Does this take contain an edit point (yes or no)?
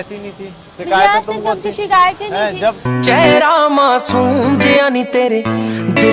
no